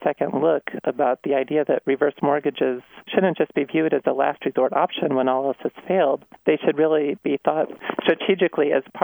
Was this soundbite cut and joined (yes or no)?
yes